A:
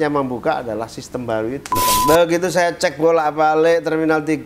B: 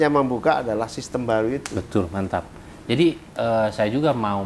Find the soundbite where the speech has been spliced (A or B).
A